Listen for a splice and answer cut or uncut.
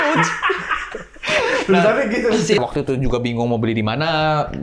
cut